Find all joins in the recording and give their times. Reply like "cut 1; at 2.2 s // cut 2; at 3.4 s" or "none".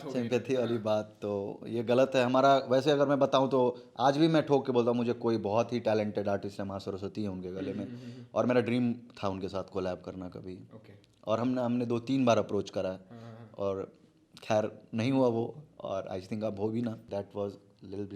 cut 1; at 17.0 s